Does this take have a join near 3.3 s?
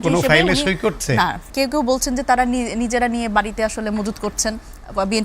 no; 1 cut; at 1.4 s

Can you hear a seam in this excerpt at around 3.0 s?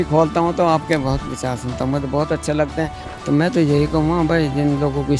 yes; 1 cut; at 3.0 s

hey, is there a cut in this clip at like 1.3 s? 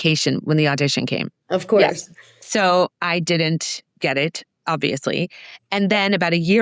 yes; 1 cut; at 1.3 s

